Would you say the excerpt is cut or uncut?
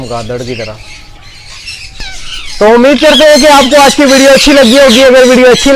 cut